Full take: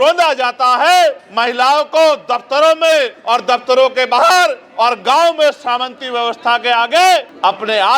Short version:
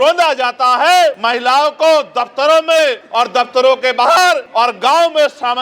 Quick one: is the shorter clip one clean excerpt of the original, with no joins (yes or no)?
no